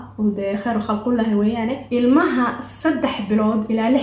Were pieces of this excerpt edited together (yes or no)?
yes